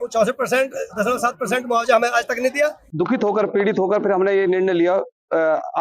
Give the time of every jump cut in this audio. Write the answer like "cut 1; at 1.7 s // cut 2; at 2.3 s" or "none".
cut 1; at 2.9 s